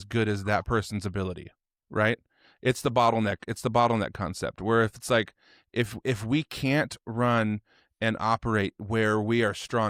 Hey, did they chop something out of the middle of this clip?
no; 0 cuts

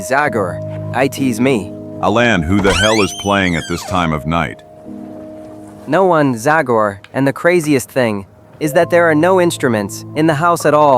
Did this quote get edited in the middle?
yes; 1 cut; at 5.7 s

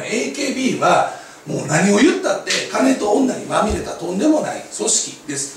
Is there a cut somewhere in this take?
no; 0 cuts

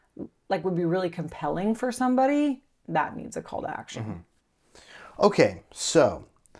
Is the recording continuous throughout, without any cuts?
yes; 0 cuts

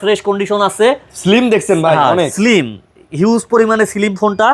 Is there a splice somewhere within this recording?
no; 0 cuts

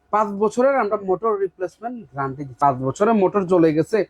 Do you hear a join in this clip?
yes; 1 cut; at 2.4 s

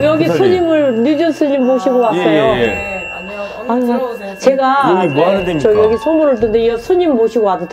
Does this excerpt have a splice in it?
no; 0 cuts

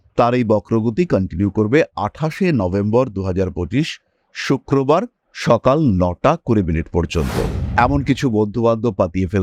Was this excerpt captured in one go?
no; 1 cut; at 7.6 s

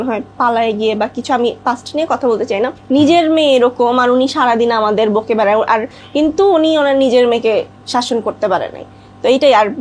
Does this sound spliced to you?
yes; 2 cuts; at 2.8 s, 6.0 s

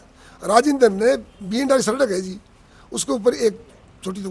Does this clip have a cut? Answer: no; 0 cuts

